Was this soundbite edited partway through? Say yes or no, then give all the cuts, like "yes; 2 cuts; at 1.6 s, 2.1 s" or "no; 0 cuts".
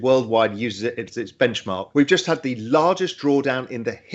no; 0 cuts